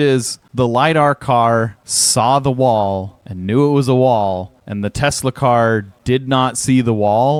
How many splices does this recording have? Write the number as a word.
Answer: zero